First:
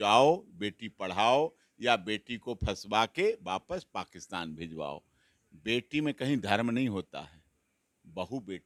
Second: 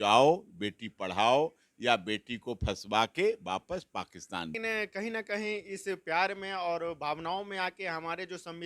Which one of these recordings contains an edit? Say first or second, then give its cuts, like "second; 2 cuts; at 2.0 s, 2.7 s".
second; 1 cut; at 4.6 s